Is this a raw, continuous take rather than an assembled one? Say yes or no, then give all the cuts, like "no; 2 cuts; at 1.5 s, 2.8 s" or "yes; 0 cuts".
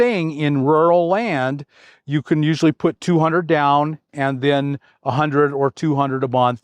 yes; 0 cuts